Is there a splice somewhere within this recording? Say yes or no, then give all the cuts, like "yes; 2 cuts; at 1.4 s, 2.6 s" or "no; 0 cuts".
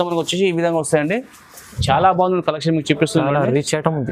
no; 0 cuts